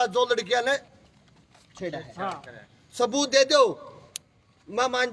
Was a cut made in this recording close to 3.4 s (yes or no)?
no